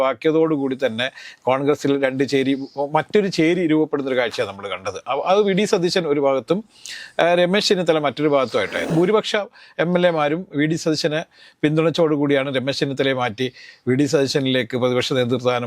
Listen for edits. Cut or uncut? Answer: cut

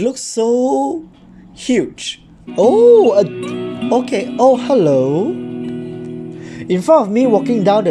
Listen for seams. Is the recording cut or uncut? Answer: cut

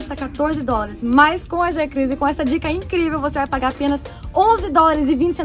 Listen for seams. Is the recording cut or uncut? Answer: uncut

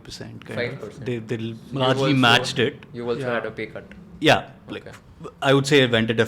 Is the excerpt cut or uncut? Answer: uncut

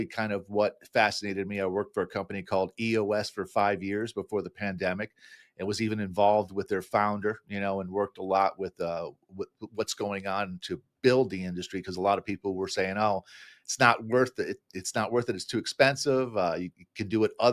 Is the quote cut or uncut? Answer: uncut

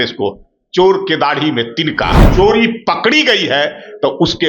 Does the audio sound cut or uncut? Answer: cut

